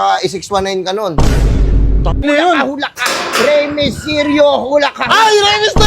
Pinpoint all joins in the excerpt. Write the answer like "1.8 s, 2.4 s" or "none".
2.2 s